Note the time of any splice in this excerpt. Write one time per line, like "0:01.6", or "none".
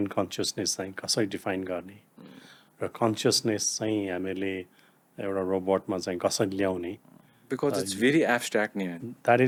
none